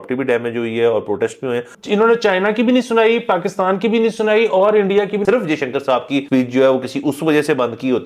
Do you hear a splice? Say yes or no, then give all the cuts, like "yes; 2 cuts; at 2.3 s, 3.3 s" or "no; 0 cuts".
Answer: yes; 3 cuts; at 1.7 s, 5.2 s, 6.3 s